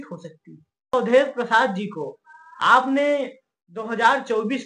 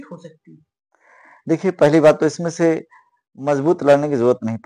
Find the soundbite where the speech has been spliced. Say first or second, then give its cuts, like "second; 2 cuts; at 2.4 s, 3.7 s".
first; 1 cut; at 0.9 s